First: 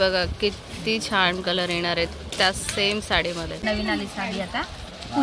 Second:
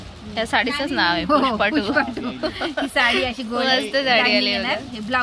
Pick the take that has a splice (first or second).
first